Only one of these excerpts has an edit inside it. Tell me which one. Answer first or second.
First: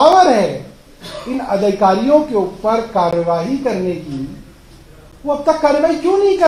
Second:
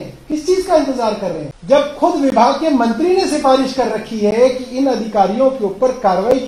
second